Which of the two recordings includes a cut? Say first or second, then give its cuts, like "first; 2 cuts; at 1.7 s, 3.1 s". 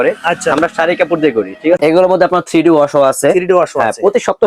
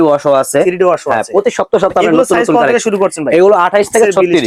first; 1 cut; at 1.8 s